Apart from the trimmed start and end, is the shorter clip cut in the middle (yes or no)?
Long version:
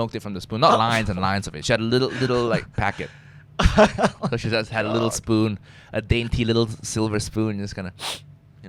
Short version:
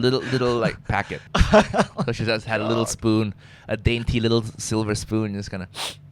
yes